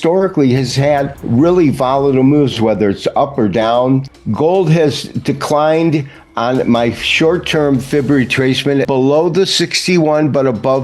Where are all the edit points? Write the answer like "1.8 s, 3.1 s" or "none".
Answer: 1.2 s, 4.2 s, 8.9 s